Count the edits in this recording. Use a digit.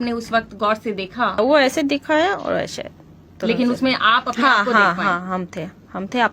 1